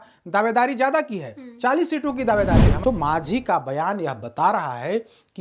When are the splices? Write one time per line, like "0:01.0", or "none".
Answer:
0:02.7